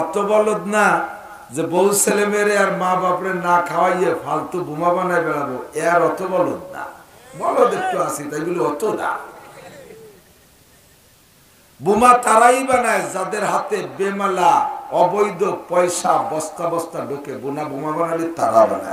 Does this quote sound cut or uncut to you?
uncut